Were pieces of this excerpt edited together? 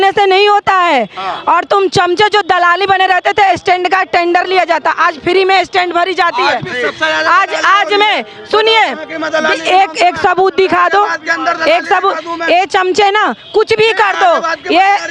no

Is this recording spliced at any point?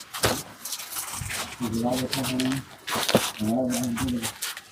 no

